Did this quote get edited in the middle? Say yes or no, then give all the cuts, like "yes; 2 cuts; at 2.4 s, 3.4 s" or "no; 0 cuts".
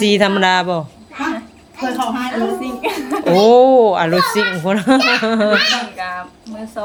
no; 0 cuts